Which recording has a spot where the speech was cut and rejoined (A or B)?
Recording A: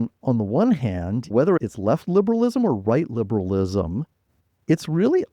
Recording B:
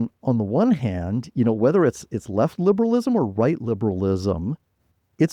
A